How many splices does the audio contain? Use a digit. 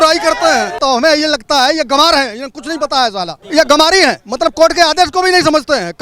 2